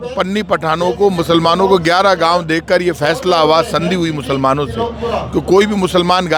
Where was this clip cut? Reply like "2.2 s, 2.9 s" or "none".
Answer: none

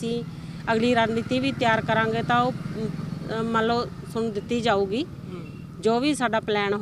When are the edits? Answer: none

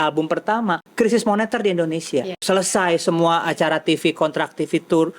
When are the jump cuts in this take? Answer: 0.8 s, 2.4 s

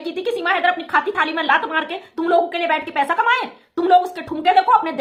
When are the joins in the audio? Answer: none

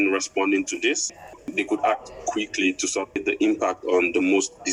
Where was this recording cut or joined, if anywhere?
1.2 s, 3.2 s

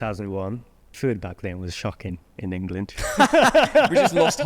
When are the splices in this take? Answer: 0.9 s

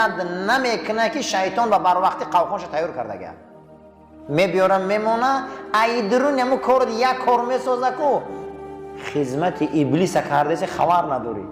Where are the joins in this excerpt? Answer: none

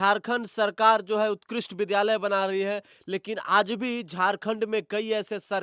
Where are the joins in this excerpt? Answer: none

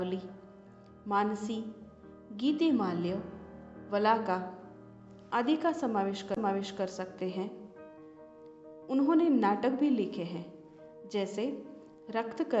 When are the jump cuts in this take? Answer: 11.3 s

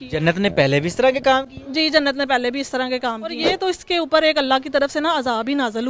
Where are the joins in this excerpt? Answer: 3.4 s

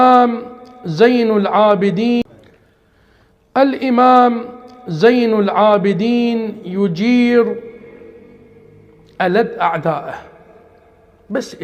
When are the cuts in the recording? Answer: 2.2 s

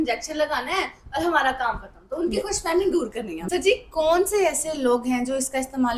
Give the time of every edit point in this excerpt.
3.4 s

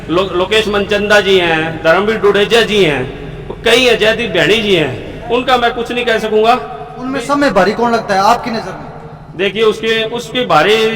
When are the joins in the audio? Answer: none

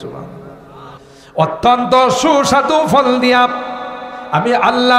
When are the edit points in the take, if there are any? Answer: 1.1 s

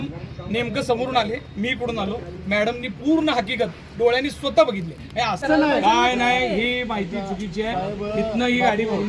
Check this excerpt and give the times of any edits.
5.4 s

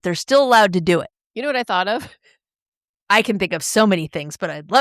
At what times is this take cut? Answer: none

